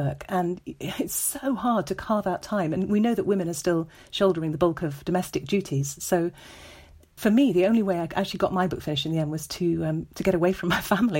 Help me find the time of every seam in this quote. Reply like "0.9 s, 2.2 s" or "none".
7.2 s